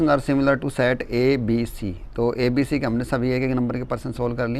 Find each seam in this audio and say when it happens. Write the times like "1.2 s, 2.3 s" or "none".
none